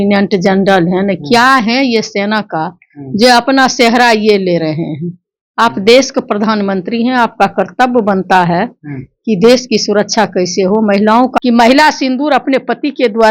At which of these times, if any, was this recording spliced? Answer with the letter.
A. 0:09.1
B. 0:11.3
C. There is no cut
B